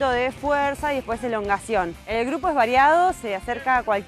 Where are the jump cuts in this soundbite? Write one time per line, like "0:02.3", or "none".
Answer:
none